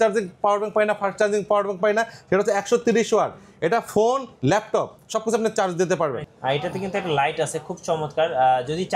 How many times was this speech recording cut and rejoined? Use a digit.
1